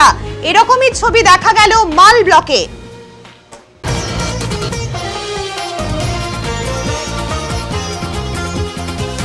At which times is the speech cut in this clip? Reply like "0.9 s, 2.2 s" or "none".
3.7 s